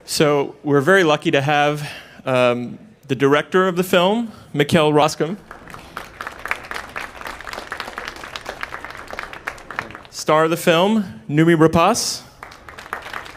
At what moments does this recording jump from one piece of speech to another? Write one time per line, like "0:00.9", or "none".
none